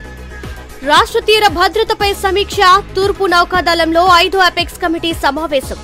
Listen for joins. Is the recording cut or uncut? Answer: uncut